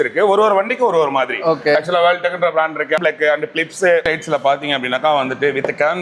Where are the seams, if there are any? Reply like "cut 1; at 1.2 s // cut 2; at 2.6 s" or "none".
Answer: none